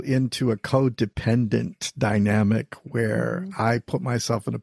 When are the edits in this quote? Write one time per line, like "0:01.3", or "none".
none